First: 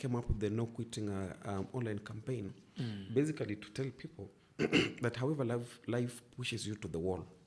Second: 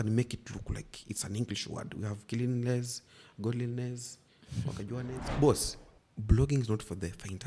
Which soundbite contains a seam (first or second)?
second